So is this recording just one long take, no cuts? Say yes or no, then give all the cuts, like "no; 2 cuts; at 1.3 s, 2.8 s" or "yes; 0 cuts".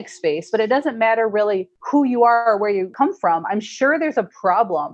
no; 2 cuts; at 1.7 s, 2.9 s